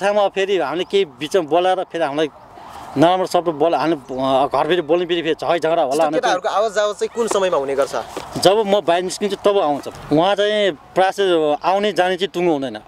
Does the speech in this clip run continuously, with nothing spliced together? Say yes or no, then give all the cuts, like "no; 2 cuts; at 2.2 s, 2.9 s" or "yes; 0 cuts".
no; 1 cut; at 9.9 s